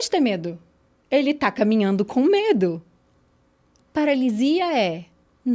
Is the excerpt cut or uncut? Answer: uncut